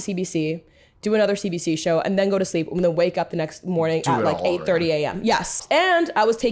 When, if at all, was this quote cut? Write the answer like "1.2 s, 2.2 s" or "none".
5.6 s